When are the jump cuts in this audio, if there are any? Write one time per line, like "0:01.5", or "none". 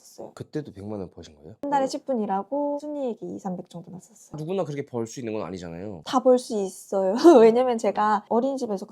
0:01.6
0:02.8
0:04.1
0:05.9